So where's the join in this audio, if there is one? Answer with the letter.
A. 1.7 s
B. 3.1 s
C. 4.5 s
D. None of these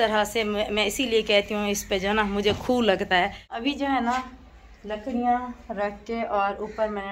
B